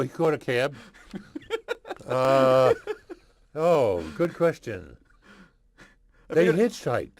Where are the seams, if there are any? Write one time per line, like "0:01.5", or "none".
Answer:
0:02.3